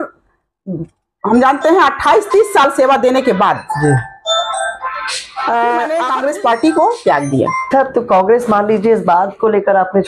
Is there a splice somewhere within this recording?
yes; 1 cut; at 6.1 s

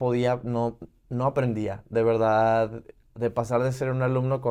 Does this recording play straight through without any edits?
yes; 0 cuts

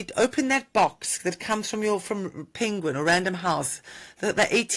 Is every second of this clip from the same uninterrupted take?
yes; 0 cuts

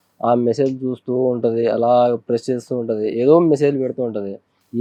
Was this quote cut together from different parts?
no; 0 cuts

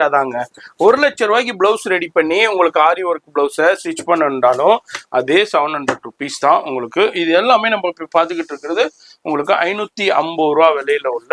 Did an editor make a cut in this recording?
no; 0 cuts

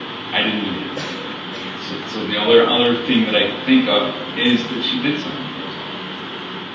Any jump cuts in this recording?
no; 0 cuts

